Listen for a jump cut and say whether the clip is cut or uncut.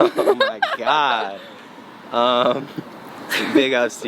uncut